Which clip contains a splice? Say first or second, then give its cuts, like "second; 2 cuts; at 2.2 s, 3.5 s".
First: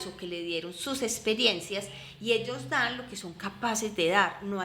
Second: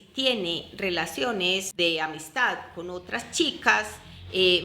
second; 1 cut; at 1.7 s